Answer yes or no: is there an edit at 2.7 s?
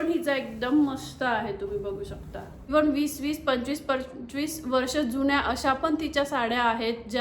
yes